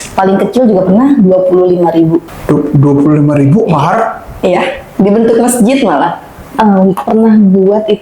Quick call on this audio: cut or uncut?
cut